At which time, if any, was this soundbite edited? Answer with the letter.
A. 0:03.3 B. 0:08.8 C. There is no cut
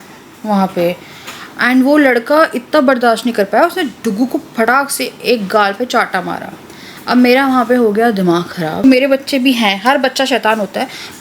B